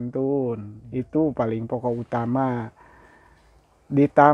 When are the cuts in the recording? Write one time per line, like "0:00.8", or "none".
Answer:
none